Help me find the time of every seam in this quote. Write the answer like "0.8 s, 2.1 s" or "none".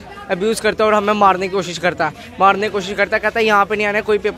none